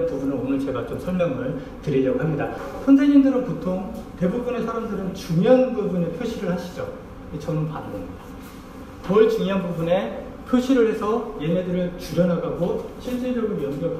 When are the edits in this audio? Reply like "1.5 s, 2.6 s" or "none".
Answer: 2.6 s